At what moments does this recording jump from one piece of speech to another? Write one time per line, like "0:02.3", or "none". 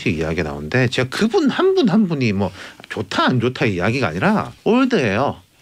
0:04.5